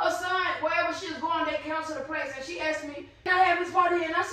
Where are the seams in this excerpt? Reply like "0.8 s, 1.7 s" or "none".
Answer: 3.3 s